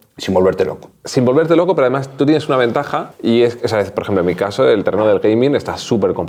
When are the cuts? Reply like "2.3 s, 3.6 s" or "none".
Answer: none